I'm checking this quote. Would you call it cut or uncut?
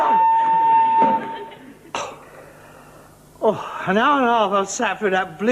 cut